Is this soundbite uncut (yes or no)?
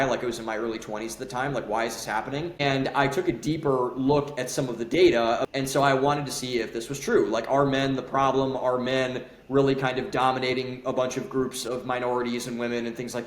no